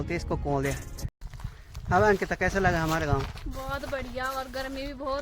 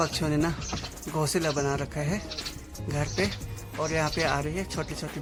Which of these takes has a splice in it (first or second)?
first